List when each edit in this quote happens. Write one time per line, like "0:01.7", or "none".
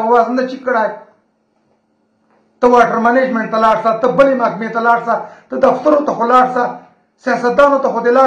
none